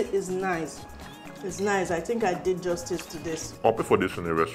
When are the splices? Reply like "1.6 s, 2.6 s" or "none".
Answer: 3.5 s